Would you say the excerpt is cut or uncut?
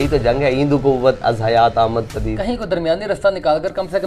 uncut